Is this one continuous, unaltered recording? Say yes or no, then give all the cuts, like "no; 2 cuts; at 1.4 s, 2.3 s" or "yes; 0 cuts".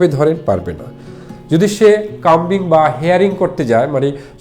yes; 0 cuts